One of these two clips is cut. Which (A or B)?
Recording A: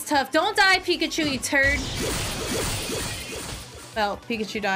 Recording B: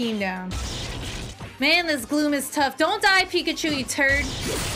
B